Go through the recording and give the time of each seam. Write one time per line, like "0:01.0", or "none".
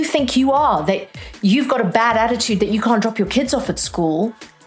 0:01.3